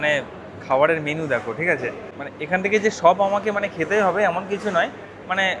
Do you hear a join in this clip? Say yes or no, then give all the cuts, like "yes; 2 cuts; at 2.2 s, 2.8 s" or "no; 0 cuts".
yes; 1 cut; at 2.1 s